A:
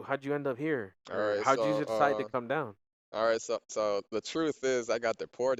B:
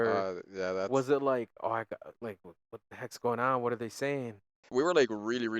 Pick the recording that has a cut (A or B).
B